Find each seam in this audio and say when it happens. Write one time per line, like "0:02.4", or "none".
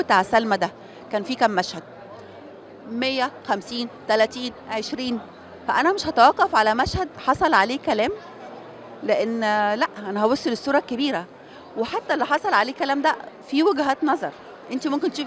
none